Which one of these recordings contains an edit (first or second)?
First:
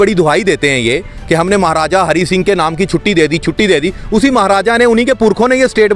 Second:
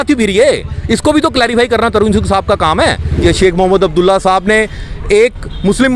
second